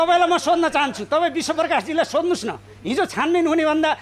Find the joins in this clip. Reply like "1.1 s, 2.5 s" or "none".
none